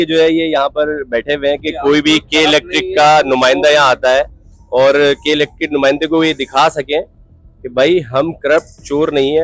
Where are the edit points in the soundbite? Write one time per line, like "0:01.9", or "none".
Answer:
none